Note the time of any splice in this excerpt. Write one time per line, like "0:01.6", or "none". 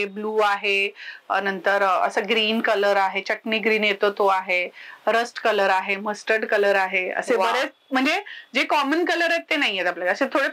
none